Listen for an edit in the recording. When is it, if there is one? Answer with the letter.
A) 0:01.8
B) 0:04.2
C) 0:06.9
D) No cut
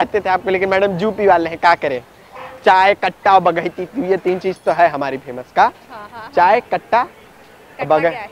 D